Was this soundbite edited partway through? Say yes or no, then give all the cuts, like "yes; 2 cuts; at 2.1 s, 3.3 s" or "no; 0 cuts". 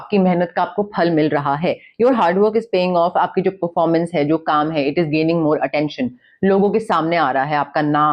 no; 0 cuts